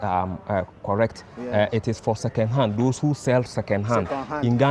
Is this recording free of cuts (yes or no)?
yes